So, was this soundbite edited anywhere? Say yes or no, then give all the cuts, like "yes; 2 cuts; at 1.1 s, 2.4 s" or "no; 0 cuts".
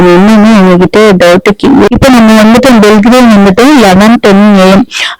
yes; 1 cut; at 1.9 s